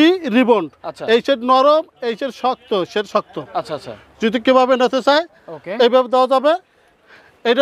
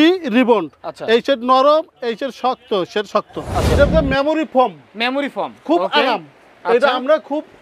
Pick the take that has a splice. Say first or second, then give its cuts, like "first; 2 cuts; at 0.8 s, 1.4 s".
second; 1 cut; at 3.8 s